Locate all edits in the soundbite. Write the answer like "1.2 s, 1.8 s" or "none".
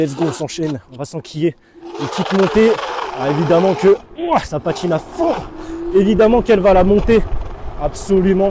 none